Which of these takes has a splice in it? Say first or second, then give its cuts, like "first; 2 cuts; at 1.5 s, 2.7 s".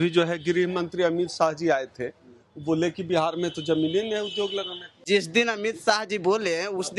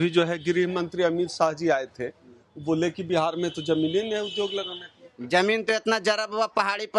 first; 1 cut; at 4.9 s